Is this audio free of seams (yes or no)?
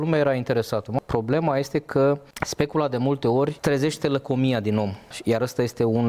no